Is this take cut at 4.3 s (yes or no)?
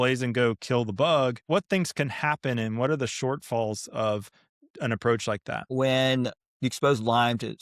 no